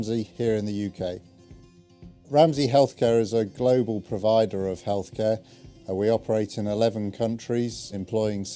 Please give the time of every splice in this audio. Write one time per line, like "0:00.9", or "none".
0:07.4